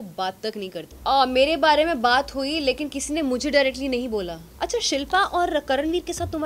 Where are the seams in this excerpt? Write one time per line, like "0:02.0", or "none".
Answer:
0:00.9
0:04.4